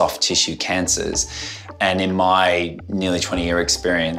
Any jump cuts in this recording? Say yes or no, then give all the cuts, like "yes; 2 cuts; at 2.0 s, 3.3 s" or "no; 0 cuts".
no; 0 cuts